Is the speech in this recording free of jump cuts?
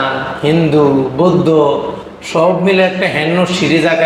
yes; 0 cuts

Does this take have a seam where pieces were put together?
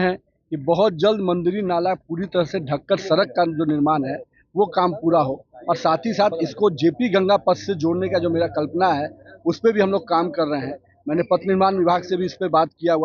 no; 0 cuts

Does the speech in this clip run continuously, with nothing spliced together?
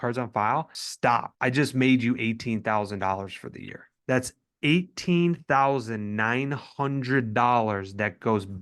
no; 2 cuts; at 0.8 s, 4.0 s

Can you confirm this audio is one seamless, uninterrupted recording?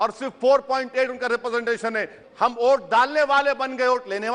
no; 1 cut; at 2.2 s

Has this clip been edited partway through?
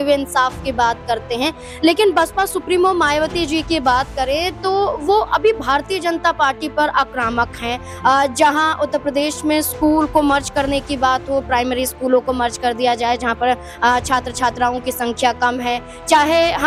no; 0 cuts

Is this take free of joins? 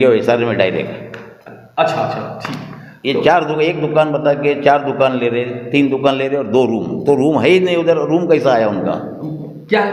yes; 0 cuts

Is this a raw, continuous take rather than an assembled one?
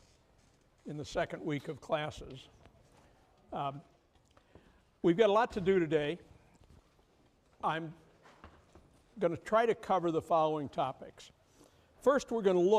no; 1 cut; at 2.1 s

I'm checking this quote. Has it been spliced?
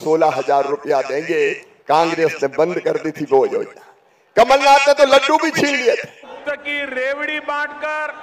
yes; 1 cut; at 6.4 s

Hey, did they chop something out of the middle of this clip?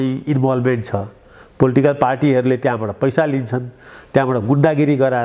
no; 0 cuts

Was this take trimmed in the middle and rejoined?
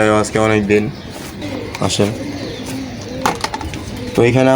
yes; 1 cut; at 1.4 s

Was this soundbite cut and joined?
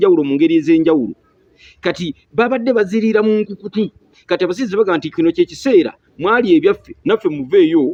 no; 0 cuts

